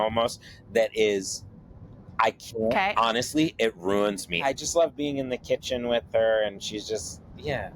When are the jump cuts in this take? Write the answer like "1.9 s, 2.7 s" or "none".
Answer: 4.4 s